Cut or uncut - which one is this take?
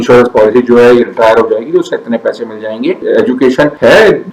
cut